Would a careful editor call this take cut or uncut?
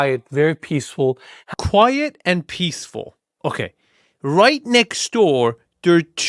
cut